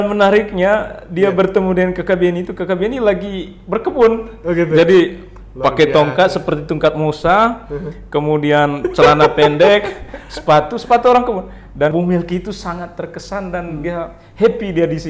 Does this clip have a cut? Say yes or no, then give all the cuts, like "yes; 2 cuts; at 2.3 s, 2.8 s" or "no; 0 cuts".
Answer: yes; 1 cut; at 11.9 s